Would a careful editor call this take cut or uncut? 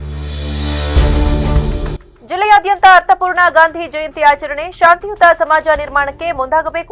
cut